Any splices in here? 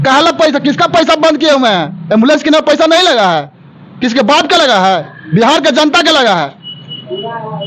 no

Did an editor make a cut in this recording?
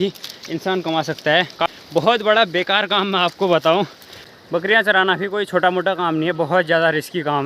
yes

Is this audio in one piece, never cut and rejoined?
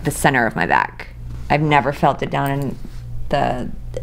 yes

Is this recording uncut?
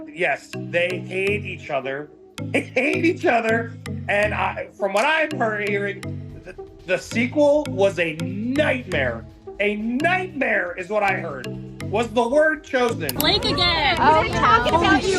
no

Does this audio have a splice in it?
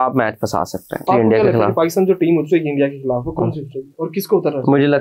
yes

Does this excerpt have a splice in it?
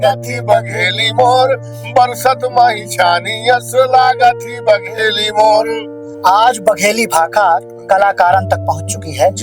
yes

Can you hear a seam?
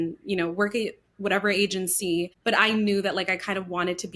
yes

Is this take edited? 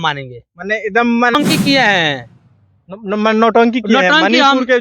yes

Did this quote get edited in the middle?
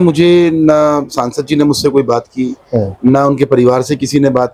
no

